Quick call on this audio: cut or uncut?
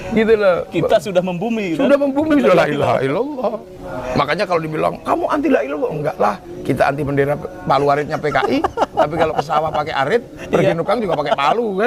uncut